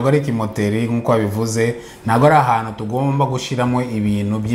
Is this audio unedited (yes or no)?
yes